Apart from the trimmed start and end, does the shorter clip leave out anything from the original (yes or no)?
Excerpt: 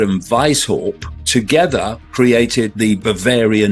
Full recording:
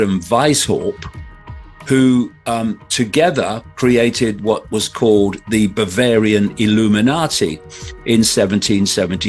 yes